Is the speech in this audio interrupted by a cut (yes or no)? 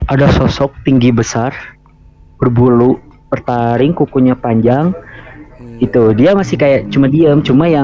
no